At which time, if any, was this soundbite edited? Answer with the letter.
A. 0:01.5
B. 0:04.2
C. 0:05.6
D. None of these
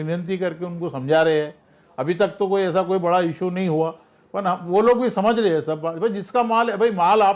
D